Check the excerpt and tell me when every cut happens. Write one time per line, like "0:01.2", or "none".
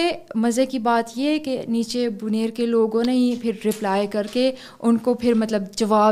none

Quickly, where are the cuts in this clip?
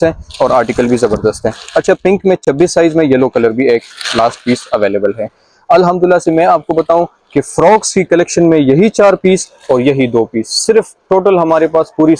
none

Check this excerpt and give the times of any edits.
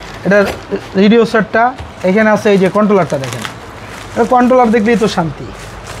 none

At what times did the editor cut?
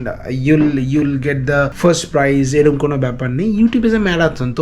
0:01.7

